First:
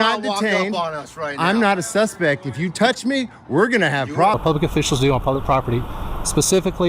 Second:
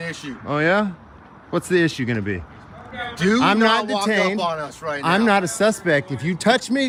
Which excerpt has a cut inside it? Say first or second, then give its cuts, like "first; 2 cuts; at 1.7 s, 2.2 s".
first; 1 cut; at 4.4 s